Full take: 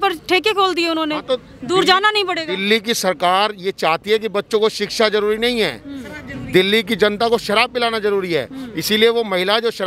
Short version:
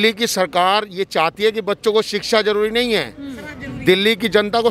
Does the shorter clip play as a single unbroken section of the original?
yes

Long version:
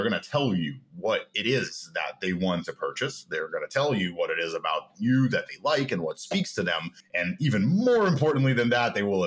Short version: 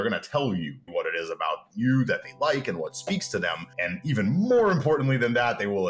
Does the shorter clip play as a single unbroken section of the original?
no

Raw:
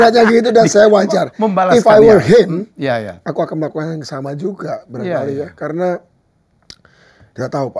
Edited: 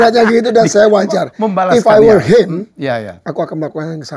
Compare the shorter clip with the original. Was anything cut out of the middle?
no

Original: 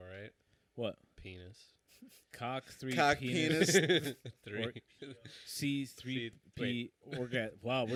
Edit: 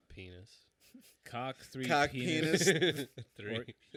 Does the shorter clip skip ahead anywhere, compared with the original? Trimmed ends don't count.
no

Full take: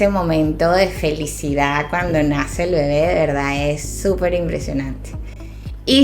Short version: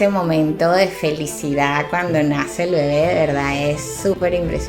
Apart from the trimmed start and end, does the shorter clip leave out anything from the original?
no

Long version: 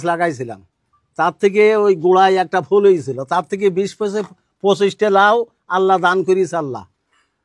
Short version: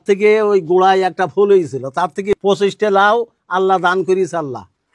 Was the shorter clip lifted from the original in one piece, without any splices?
no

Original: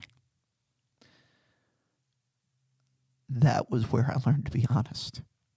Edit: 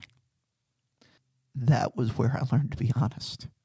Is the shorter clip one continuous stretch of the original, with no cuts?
no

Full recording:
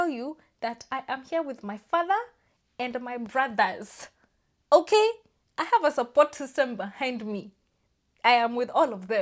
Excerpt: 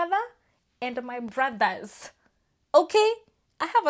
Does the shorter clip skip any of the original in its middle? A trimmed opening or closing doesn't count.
no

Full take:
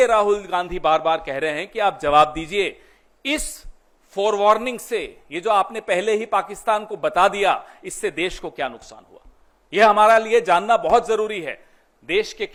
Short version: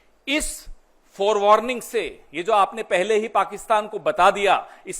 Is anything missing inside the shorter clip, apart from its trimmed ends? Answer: no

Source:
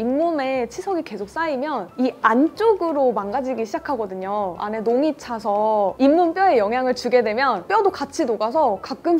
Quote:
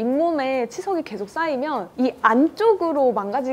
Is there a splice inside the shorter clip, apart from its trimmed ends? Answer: no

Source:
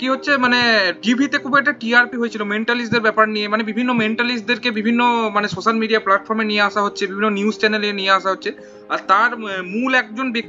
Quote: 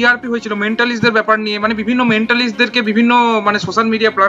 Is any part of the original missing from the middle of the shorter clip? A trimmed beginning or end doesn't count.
no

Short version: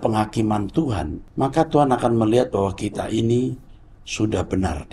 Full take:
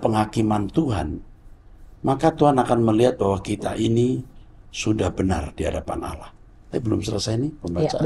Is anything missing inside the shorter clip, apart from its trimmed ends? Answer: yes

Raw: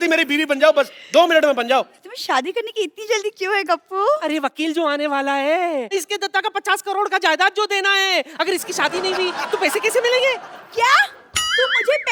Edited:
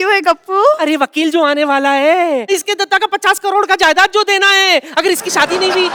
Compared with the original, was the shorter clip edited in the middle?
no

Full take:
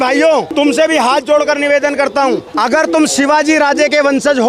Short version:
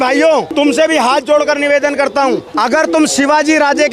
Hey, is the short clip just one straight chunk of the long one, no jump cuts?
yes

